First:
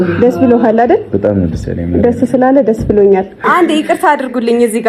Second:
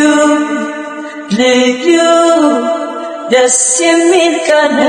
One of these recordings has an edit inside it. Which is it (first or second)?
first